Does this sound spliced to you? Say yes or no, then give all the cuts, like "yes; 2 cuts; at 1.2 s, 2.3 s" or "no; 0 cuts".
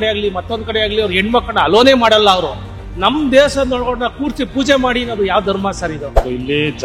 no; 0 cuts